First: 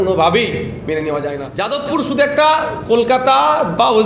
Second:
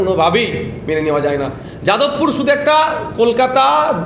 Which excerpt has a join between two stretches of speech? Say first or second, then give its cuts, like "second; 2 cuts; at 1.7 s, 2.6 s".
first; 1 cut; at 1.5 s